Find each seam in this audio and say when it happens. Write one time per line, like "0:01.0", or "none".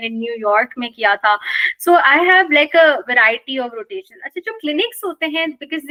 none

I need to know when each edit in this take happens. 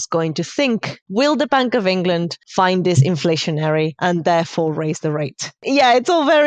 0:01.0
0:02.4
0:03.9
0:05.6

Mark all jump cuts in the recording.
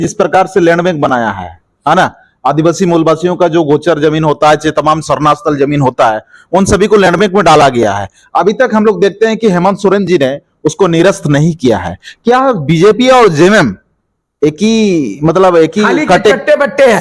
none

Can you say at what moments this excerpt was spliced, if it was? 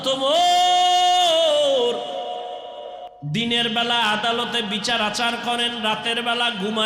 0:03.0

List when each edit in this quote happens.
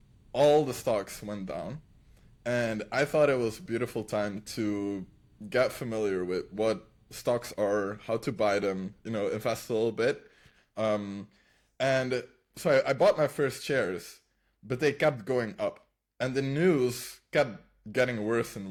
none

